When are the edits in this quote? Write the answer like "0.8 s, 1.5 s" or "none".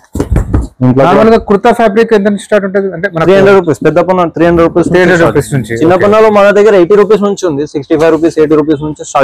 none